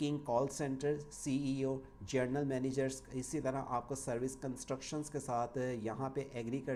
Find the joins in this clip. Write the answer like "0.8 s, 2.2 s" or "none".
none